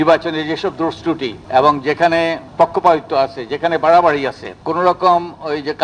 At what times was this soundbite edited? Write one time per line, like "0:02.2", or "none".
0:01.3
0:02.4
0:04.5

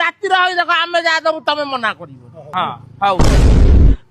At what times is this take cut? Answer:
0:02.5

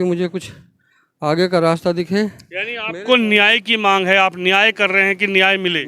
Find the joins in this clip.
none

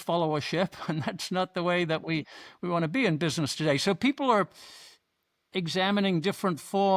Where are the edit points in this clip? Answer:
none

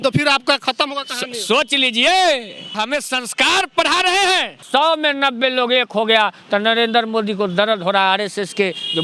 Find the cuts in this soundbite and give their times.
0:02.8
0:04.6

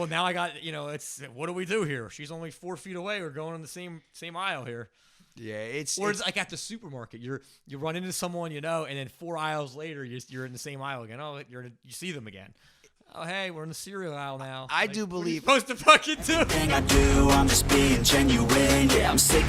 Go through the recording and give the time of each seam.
0:16.5

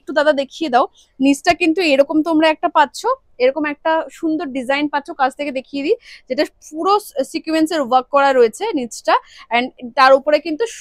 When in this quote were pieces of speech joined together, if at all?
none

